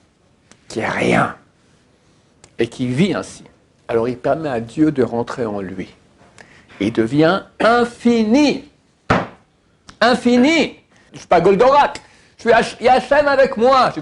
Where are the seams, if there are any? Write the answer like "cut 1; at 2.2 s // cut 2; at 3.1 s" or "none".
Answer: cut 1; at 11.1 s